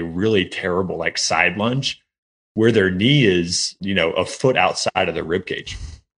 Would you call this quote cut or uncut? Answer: cut